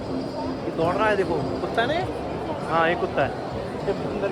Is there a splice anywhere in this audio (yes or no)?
no